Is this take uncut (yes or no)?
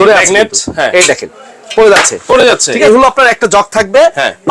no